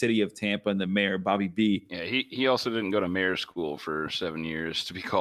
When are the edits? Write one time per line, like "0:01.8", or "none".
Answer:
0:01.9